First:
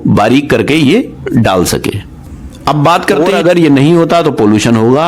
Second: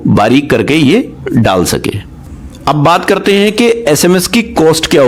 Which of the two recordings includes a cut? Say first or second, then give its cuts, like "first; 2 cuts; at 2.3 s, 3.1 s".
first; 1 cut; at 3.2 s